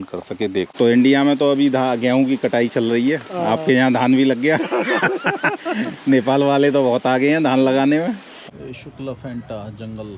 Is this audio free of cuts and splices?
no; 2 cuts; at 0.8 s, 8.3 s

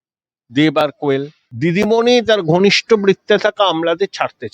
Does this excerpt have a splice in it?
yes; 1 cut; at 1.4 s

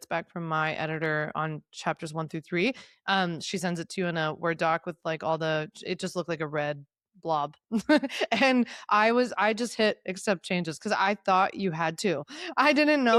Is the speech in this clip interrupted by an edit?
no; 0 cuts

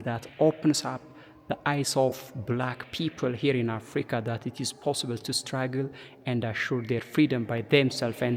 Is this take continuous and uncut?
yes; 0 cuts

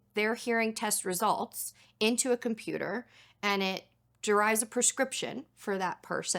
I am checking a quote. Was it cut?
no; 0 cuts

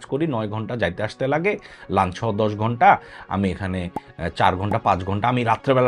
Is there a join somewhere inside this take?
no; 0 cuts

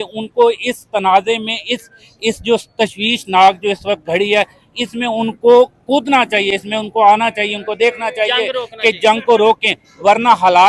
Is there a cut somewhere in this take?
no; 0 cuts

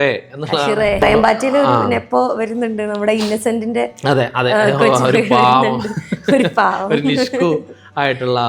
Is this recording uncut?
no; 1 cut; at 1.0 s

